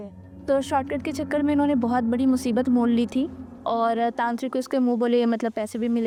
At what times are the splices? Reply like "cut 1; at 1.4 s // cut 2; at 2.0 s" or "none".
none

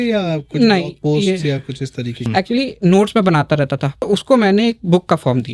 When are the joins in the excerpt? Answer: cut 1; at 2.2 s // cut 2; at 4.0 s

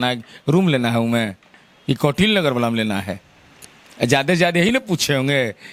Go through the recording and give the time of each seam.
none

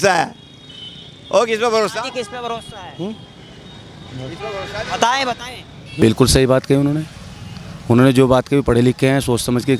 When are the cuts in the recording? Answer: cut 1; at 5.9 s

